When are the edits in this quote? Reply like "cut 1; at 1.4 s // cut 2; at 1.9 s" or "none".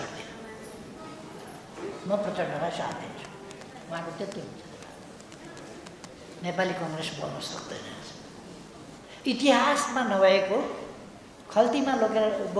cut 1; at 8.8 s